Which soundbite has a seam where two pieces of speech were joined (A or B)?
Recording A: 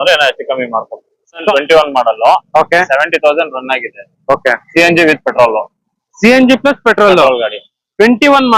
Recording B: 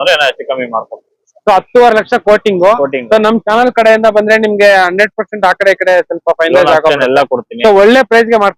A